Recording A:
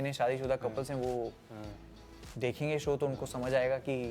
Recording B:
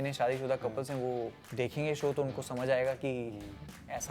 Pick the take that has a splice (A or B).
B